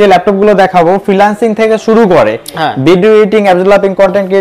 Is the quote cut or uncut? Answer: uncut